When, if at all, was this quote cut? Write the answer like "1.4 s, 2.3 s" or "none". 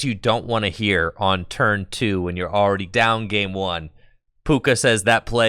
2.9 s